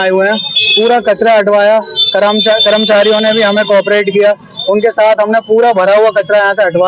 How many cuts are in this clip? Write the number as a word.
zero